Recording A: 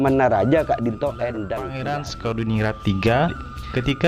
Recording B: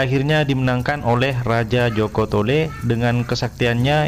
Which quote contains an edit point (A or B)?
A